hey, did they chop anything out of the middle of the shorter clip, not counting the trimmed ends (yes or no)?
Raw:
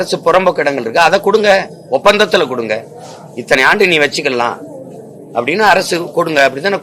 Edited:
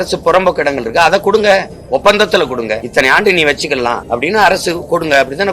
yes